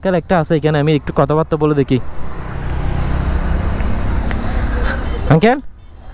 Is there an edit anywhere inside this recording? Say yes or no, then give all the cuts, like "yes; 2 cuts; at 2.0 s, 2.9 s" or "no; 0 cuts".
no; 0 cuts